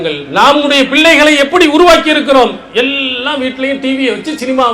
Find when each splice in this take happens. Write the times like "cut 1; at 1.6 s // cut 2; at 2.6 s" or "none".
none